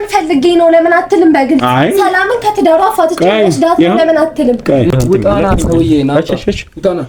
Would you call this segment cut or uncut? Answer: cut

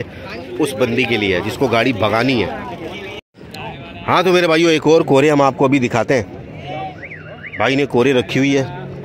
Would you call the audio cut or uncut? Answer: cut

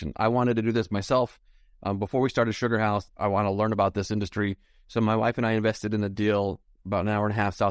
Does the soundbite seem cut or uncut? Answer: cut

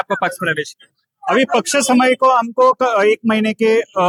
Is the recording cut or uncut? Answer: uncut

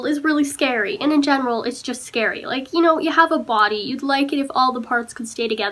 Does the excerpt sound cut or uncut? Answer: uncut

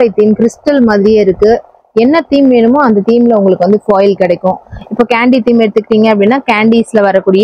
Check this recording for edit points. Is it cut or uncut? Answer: uncut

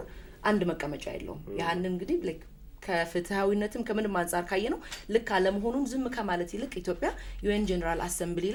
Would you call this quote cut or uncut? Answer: uncut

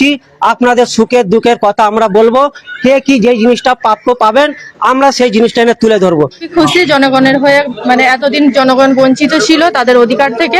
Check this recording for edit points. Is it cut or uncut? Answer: cut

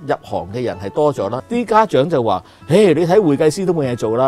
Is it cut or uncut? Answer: cut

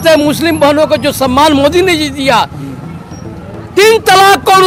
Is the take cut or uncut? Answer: uncut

